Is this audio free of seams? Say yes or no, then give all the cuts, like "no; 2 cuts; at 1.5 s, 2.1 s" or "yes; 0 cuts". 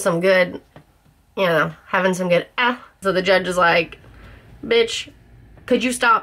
no; 1 cut; at 2.9 s